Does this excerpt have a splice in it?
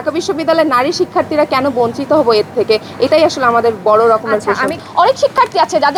no; 0 cuts

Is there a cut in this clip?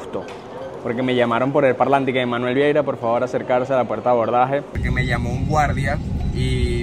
yes; 1 cut; at 4.8 s

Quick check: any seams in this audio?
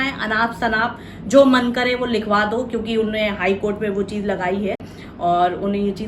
no; 0 cuts

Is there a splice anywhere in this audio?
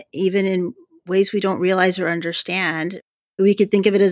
no; 0 cuts

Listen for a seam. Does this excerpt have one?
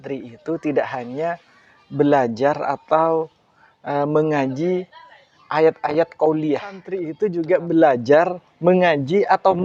yes; 1 cut; at 7.1 s

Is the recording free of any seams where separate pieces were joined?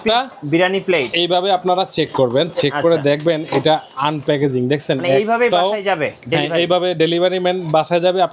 yes; 0 cuts

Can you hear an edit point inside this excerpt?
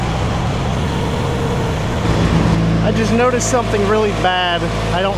yes; 1 cut; at 2.5 s

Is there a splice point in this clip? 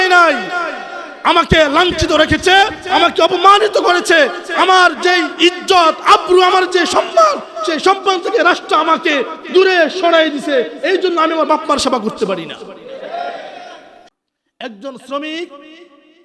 yes; 1 cut; at 13.9 s

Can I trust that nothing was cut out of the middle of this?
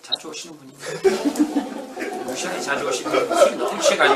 yes; 0 cuts

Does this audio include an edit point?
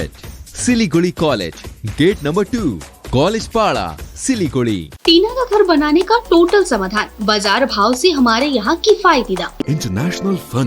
yes; 2 cuts; at 4.9 s, 9.6 s

